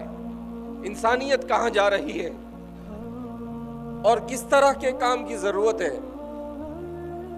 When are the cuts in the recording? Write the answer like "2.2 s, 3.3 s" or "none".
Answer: 2.3 s, 3.7 s, 6.0 s